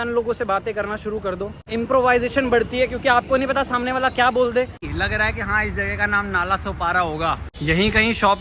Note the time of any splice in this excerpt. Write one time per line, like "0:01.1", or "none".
0:01.6
0:04.8
0:07.6